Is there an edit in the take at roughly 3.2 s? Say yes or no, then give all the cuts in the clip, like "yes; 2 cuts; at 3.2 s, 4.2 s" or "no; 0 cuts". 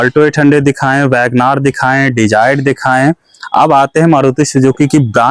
no; 0 cuts